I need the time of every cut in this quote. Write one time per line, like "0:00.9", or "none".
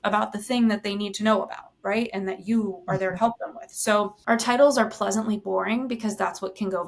none